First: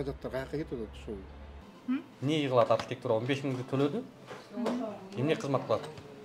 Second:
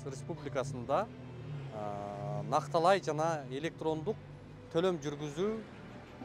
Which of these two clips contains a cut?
first; 1 cut; at 1.7 s

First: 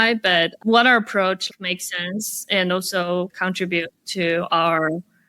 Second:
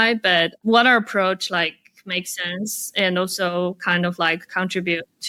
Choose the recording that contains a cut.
first; 2 cuts; at 1.4 s, 3.3 s

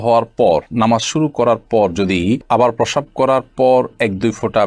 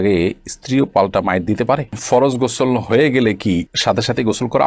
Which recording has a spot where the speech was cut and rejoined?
second; 1 cut; at 1.9 s

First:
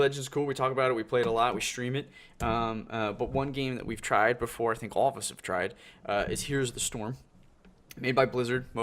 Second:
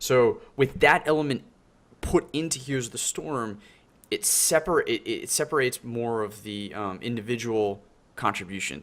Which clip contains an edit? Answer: first; 1 cut; at 4.1 s

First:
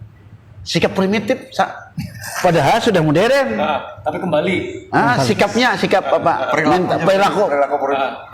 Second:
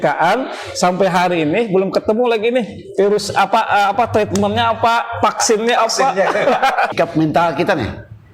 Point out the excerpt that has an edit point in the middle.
second; 1 cut; at 6.9 s

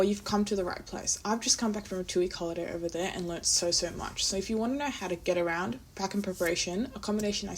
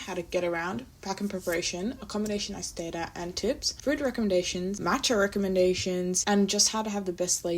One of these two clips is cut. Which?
second; 3 cuts; at 3.7 s, 4.8 s, 6.2 s

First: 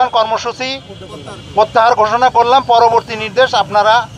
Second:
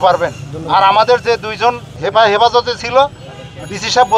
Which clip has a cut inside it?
second; 1 cut; at 2.0 s

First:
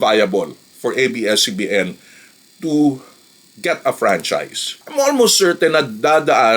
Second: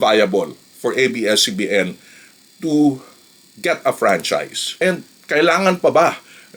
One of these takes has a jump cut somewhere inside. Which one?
first; 1 cut; at 4.7 s

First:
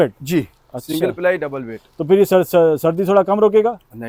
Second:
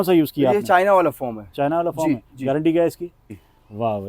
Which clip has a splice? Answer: second; 1 cut; at 3.2 s

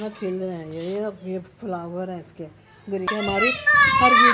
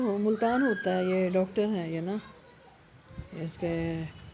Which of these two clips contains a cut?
first; 1 cut; at 3.1 s

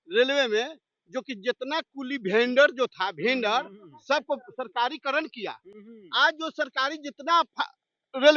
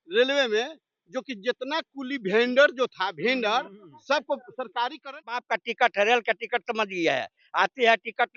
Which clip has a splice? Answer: second; 1 cut; at 5.4 s

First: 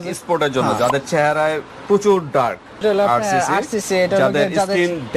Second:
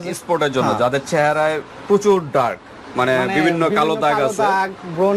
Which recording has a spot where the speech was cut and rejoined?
first; 1 cut; at 2.8 s

